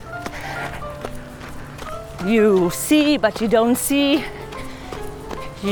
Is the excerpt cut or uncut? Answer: cut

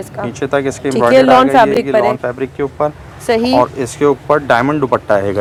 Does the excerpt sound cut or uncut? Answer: uncut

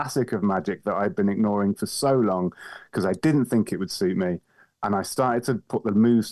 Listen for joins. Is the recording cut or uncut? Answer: uncut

